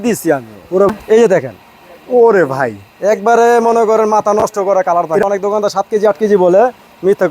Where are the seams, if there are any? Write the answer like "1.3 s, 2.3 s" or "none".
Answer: 0.9 s, 5.2 s